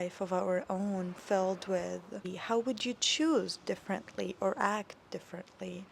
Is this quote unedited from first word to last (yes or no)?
no